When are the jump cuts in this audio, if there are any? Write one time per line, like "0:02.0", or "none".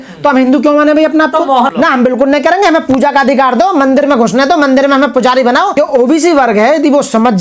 0:01.7
0:05.7